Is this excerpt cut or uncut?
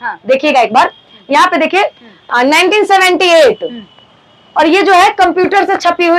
uncut